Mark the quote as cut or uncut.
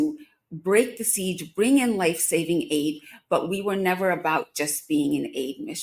uncut